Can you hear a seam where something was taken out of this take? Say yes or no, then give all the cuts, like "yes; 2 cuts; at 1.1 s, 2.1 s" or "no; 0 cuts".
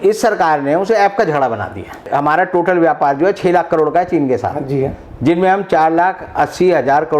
yes; 1 cut; at 2.0 s